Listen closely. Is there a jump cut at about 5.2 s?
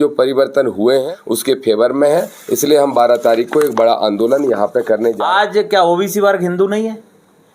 yes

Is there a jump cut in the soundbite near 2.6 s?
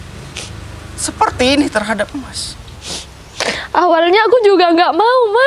yes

